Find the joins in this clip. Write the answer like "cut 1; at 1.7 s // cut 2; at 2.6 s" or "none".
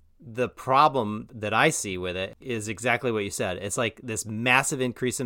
cut 1; at 1.2 s // cut 2; at 2.4 s